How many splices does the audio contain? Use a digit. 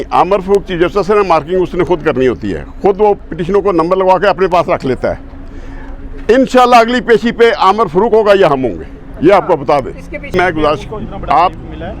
1